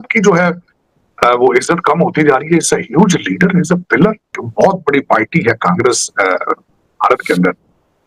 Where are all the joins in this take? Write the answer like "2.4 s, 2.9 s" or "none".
4.4 s